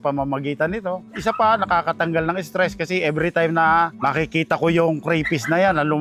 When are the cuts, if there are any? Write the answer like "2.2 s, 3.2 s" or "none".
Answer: none